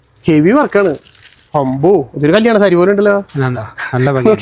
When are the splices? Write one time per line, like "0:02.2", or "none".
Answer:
none